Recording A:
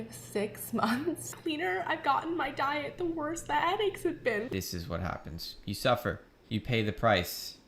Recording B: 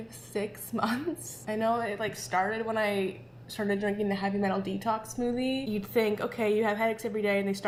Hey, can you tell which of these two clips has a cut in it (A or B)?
A